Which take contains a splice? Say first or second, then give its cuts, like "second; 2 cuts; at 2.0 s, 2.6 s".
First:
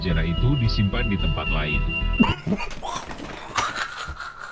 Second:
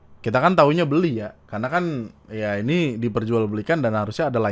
first; 1 cut; at 2.1 s